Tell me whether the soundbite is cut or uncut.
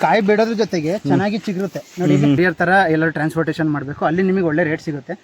cut